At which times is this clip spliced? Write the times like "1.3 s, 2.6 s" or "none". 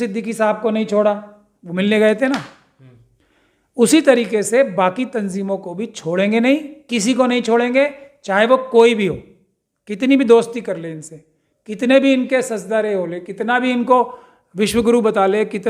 none